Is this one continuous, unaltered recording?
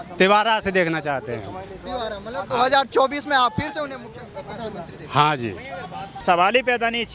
no; 1 cut; at 6.1 s

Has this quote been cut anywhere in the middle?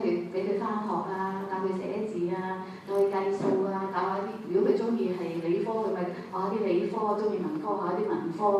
yes; 1 cut; at 2.9 s

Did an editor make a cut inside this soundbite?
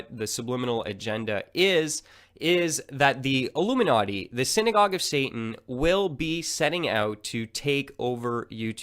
yes; 1 cut; at 3.2 s

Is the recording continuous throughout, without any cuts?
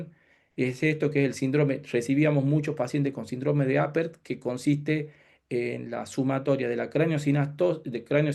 yes; 0 cuts

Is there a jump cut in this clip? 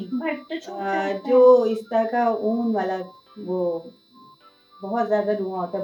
no; 0 cuts

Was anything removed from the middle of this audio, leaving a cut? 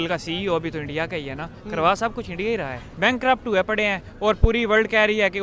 yes; 1 cut; at 2.8 s

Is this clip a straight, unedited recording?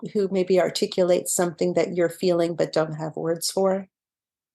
yes; 0 cuts

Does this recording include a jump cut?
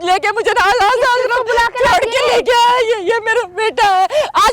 no; 0 cuts

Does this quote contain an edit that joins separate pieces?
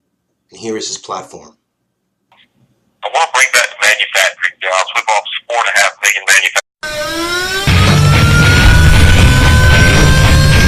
no; 0 cuts

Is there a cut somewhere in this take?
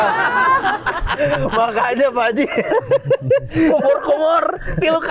no; 0 cuts

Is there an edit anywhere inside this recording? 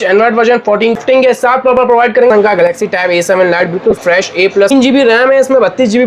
yes; 3 cuts; at 1.0 s, 2.3 s, 4.7 s

